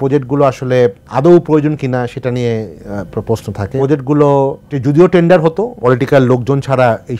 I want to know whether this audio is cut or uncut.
cut